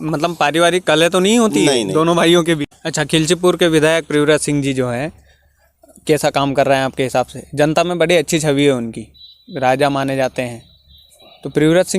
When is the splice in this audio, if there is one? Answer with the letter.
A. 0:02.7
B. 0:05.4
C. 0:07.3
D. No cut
A